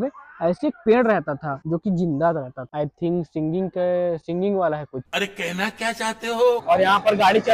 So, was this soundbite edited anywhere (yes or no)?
yes